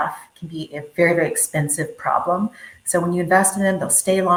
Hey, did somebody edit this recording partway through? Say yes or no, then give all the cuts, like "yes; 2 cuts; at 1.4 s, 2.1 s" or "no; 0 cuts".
no; 0 cuts